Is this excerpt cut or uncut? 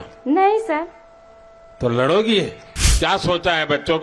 cut